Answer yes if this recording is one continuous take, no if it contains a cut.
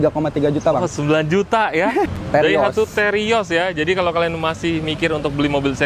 no